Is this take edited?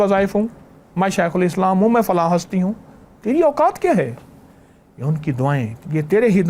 no; 0 cuts

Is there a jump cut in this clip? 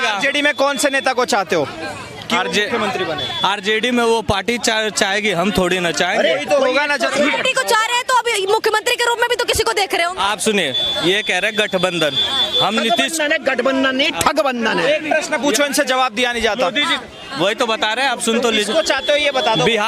no; 0 cuts

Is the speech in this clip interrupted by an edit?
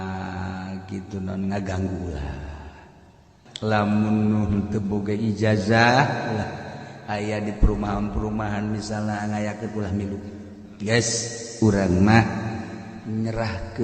yes; 1 cut; at 3.4 s

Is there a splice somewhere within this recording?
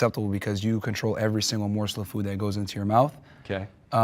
no; 0 cuts

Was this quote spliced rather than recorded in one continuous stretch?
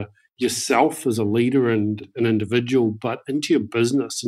yes; 1 cut; at 2.1 s

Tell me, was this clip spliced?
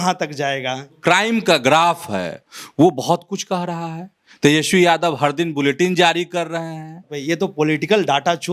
yes; 2 cuts; at 0.9 s, 7.1 s

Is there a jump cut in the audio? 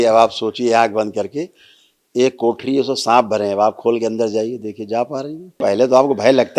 yes; 1 cut; at 5.6 s

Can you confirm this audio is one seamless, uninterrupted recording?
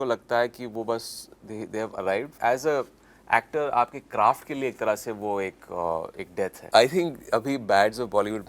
no; 2 cuts; at 2.4 s, 6.6 s

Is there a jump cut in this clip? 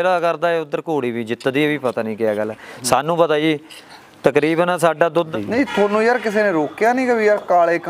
yes; 1 cut; at 5.3 s

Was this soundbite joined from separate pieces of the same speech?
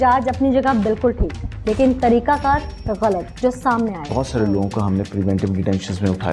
yes; 1 cut; at 4.0 s

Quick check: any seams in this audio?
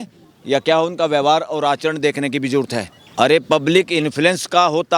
yes; 1 cut; at 3.0 s

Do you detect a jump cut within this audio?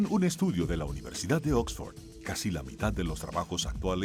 no; 0 cuts

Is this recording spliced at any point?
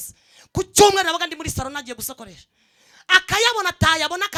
no; 0 cuts

